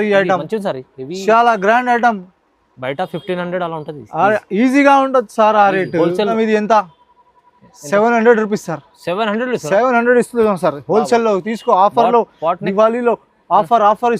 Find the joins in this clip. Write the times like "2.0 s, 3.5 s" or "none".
6.3 s